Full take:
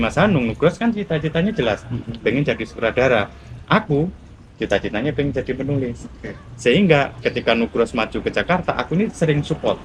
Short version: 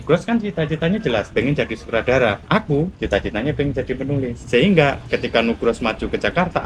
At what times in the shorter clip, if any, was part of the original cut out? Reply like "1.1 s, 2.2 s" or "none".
1.3 s, 2.6 s, 4.4 s